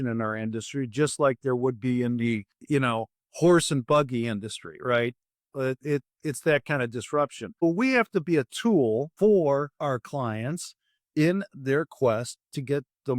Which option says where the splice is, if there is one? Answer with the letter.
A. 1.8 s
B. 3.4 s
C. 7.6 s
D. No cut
C